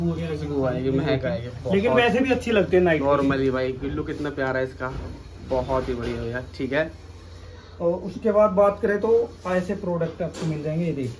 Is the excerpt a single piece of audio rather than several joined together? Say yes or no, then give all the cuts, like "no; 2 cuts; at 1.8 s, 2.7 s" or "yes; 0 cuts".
yes; 0 cuts